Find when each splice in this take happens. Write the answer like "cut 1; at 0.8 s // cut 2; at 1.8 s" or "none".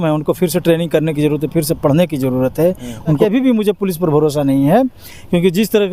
cut 1; at 3.2 s